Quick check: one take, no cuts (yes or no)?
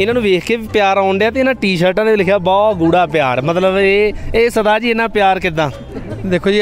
yes